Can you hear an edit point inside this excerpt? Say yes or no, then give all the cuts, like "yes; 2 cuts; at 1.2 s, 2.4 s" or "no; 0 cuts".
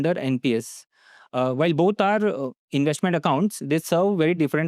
no; 0 cuts